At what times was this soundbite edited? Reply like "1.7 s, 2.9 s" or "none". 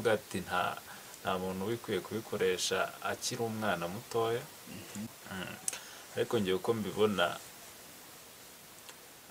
5.2 s